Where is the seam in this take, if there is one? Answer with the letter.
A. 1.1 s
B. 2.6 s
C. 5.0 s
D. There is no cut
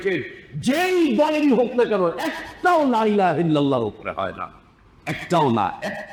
D